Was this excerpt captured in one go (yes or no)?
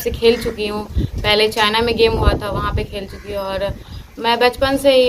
yes